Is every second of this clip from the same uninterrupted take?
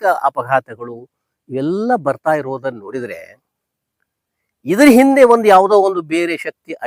yes; 0 cuts

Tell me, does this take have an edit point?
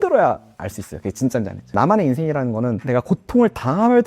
yes; 2 cuts; at 1.7 s, 2.8 s

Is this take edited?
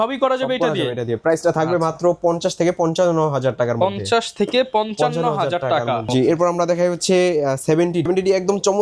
no; 0 cuts

